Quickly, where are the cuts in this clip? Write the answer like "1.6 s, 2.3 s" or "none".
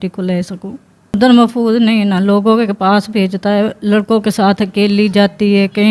1.1 s